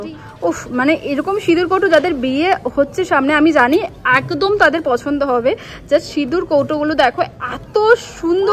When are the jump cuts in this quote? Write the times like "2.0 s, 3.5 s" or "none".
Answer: none